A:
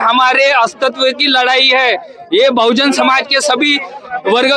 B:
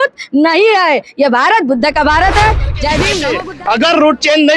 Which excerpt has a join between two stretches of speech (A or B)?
B